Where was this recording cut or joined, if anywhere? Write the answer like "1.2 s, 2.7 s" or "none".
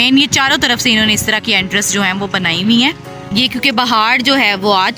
3.1 s